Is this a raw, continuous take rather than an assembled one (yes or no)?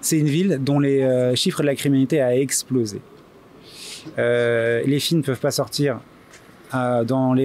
yes